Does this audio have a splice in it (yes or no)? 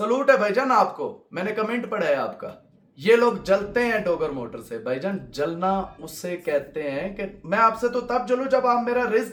no